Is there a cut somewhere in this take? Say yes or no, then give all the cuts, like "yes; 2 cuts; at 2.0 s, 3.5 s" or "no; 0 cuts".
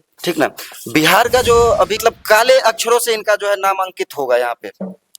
yes; 1 cut; at 2.0 s